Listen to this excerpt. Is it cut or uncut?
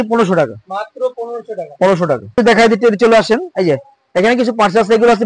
cut